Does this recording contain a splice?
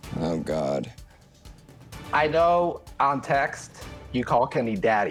no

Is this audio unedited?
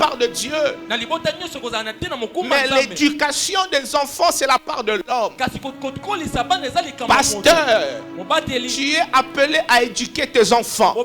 yes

